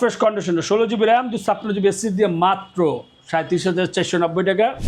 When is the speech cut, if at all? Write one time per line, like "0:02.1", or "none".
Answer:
none